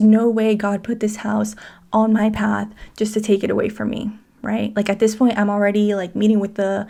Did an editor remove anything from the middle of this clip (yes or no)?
no